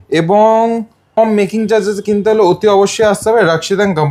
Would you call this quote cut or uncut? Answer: cut